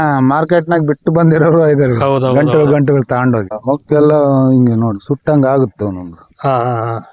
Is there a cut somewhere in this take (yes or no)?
yes